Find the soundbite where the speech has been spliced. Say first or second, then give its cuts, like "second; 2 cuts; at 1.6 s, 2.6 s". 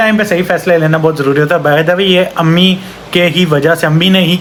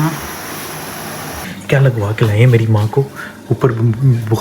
second; 1 cut; at 1.4 s